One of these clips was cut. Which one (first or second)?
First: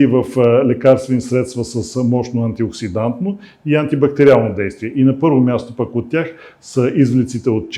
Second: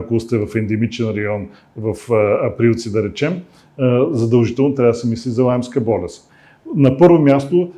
second